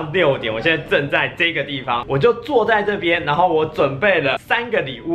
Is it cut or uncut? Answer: cut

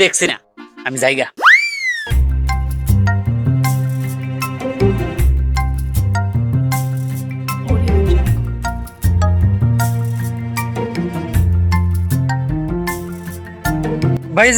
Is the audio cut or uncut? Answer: uncut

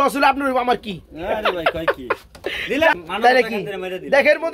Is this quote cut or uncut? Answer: cut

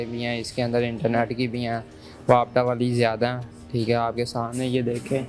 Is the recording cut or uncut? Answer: uncut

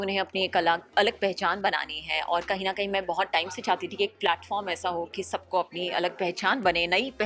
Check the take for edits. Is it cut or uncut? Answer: uncut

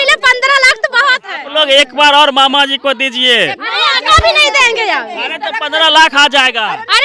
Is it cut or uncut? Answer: cut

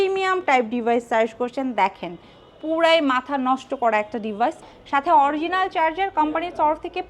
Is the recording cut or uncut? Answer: cut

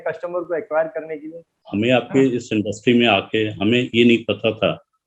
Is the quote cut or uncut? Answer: cut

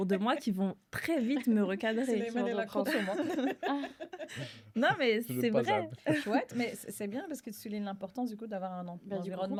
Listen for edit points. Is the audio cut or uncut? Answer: uncut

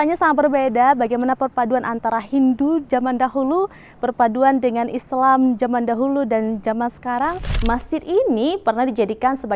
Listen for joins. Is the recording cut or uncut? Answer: cut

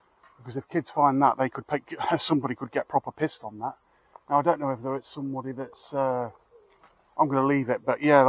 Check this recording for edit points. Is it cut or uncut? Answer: uncut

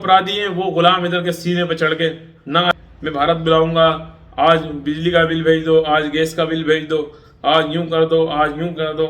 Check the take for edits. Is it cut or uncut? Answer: cut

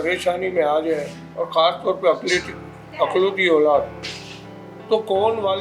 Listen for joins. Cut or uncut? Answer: uncut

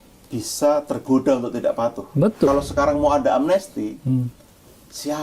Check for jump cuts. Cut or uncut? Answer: cut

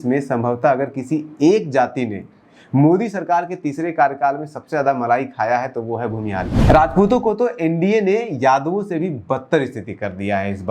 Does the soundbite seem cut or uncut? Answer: cut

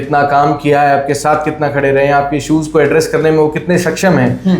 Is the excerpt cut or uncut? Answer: uncut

